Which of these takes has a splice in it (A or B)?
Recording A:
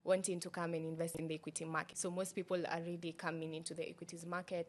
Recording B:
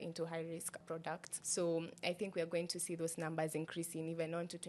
A